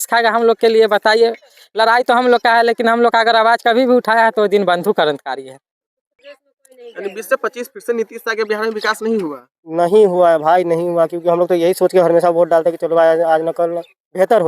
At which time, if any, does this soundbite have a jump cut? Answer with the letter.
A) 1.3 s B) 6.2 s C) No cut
B